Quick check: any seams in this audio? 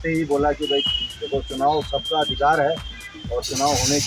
no; 0 cuts

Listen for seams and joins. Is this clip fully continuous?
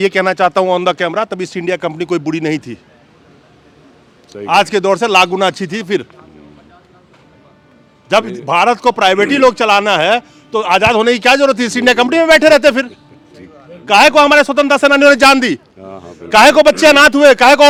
yes; 0 cuts

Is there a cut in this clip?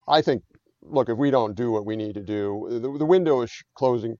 no; 0 cuts

